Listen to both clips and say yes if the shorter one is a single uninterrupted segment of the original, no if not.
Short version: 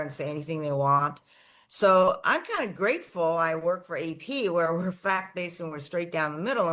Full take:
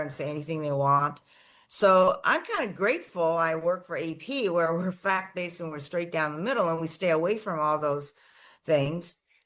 yes